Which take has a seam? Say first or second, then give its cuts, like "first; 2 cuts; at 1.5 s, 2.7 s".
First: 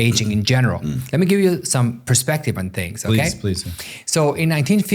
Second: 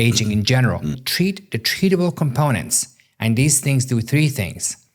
second; 1 cut; at 1.0 s